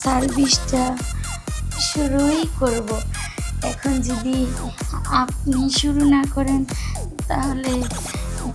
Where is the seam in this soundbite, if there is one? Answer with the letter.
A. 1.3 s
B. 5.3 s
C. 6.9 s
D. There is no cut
D